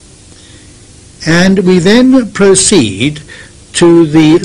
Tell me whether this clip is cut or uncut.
uncut